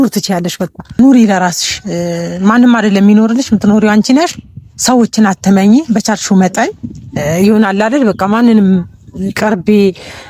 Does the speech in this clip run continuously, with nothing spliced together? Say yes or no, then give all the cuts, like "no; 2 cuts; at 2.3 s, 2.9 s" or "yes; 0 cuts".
no; 1 cut; at 1.0 s